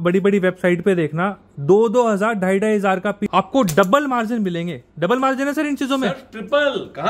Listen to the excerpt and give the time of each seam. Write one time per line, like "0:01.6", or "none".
0:03.2